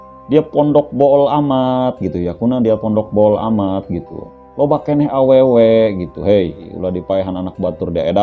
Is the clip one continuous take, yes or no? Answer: no